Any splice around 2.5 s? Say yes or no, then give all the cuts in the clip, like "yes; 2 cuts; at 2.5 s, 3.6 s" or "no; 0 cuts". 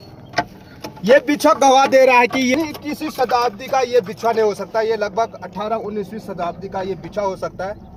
yes; 1 cut; at 2.5 s